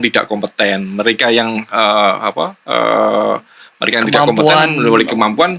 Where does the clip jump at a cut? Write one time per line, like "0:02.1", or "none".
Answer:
none